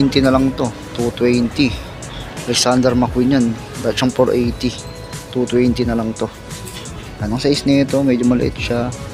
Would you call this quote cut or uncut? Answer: uncut